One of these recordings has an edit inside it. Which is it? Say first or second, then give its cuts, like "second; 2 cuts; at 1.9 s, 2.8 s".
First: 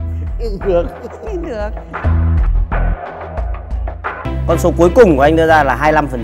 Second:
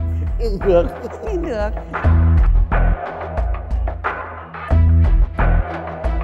first; 1 cut; at 4.3 s